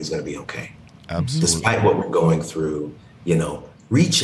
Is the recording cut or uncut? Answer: uncut